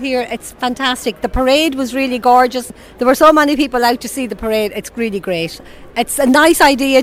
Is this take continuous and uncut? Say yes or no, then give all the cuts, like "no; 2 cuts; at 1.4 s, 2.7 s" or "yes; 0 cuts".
no; 1 cut; at 2.8 s